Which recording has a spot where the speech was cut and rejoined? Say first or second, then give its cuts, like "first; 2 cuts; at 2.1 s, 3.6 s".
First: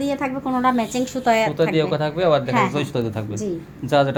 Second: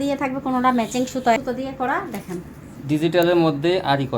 second; 1 cut; at 1.4 s